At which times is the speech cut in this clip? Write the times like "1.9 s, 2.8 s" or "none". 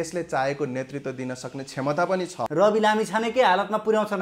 2.4 s